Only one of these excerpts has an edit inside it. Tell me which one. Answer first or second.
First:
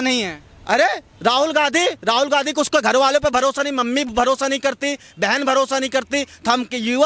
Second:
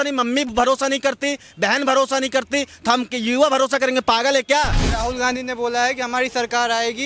second